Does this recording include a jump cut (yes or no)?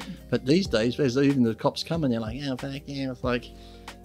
no